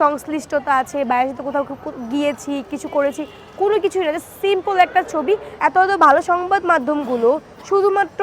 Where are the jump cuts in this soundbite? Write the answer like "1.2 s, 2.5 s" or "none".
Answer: 5.5 s